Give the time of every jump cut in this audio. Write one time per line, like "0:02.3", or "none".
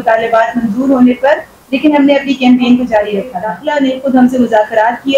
0:03.5

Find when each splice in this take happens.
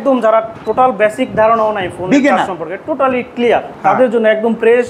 0:03.7

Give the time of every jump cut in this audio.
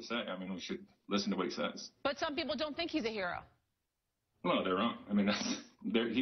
0:01.9

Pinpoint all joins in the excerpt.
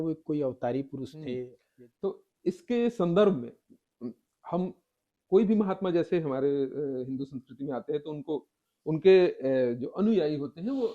0:01.6

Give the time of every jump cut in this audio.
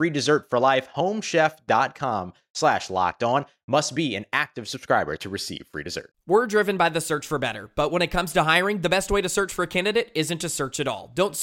0:06.1

